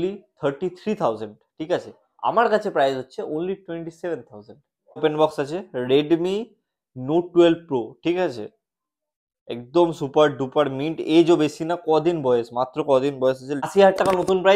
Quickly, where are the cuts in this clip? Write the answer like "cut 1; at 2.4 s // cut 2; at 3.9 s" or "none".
cut 1; at 5.0 s // cut 2; at 13.7 s